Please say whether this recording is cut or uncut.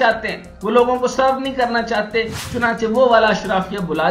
uncut